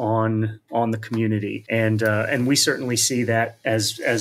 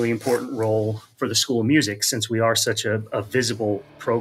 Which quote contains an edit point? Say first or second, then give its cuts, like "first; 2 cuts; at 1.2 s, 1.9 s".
first; 1 cut; at 1.6 s